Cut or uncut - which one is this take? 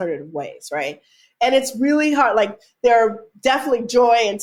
uncut